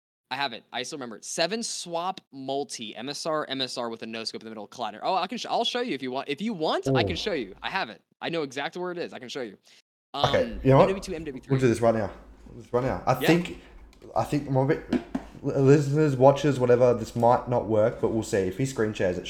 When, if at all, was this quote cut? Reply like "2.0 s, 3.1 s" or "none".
none